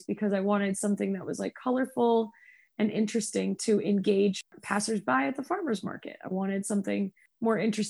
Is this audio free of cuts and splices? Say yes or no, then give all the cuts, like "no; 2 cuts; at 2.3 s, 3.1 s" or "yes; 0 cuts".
no; 1 cut; at 4.5 s